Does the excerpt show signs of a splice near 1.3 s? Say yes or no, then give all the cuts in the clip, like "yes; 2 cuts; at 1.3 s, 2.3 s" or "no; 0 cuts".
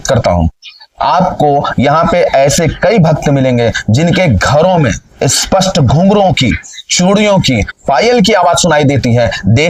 no; 0 cuts